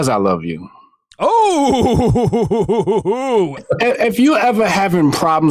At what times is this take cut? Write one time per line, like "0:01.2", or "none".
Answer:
0:03.6